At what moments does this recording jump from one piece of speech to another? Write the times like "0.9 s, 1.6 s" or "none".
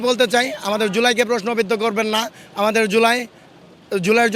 none